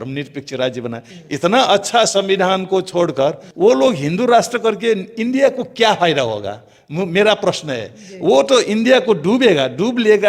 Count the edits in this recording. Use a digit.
1